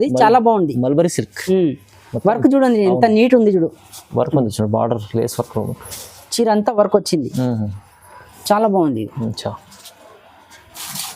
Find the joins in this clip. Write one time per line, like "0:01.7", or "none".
none